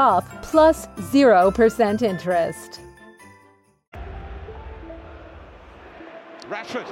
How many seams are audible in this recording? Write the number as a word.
one